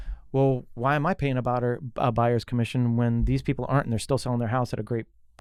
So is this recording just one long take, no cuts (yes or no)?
yes